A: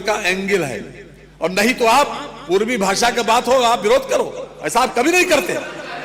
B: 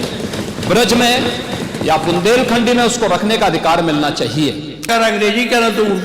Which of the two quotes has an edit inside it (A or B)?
B